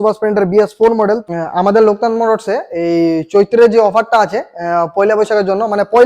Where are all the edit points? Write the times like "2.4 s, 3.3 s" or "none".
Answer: 1.2 s